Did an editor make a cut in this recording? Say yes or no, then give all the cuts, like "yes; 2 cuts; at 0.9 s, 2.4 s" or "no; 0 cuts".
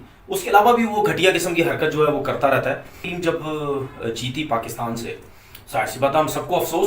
yes; 1 cut; at 3.1 s